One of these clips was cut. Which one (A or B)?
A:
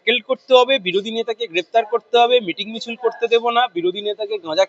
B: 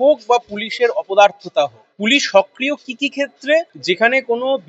B